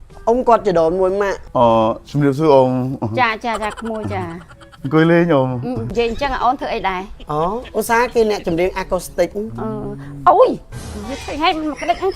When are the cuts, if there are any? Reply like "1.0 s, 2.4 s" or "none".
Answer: 5.8 s